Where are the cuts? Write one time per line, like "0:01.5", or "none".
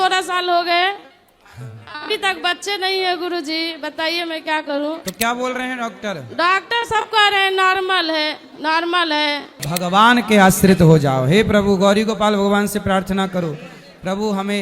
0:05.1
0:09.6

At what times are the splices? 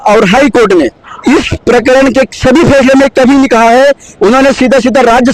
0:01.1
0:04.1

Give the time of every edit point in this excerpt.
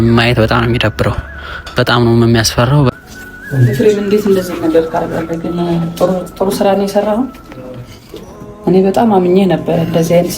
0:02.9

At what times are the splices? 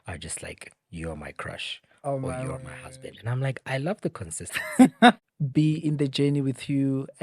0:05.2

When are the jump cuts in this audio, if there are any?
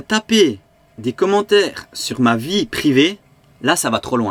none

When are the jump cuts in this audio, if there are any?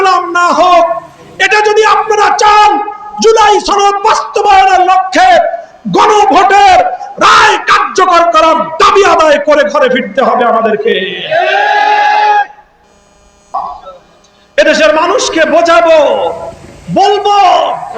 0:13.5

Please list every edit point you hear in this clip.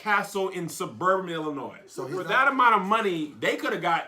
0:02.2

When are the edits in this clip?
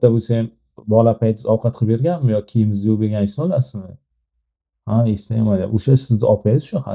none

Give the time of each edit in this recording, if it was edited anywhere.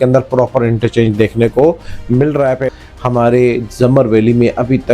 0:02.7

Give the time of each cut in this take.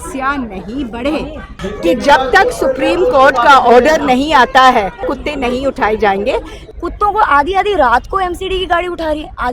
0:01.5
0:05.2
0:06.6

